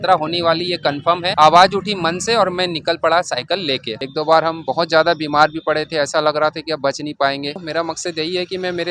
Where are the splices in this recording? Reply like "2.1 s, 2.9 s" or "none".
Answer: 1.4 s, 3.9 s, 7.6 s